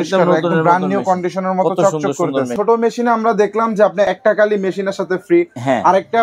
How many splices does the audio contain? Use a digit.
2